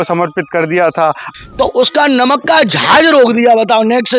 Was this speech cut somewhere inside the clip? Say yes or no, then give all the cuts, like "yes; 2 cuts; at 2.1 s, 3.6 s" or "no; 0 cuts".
yes; 1 cut; at 1.3 s